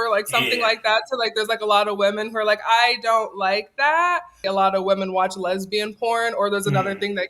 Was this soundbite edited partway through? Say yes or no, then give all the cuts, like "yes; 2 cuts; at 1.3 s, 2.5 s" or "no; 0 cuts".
yes; 1 cut; at 4.4 s